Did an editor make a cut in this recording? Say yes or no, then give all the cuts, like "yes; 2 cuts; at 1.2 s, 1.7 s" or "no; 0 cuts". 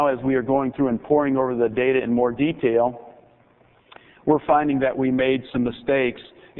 yes; 1 cut; at 1.0 s